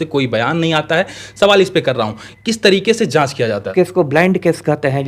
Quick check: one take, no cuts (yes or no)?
no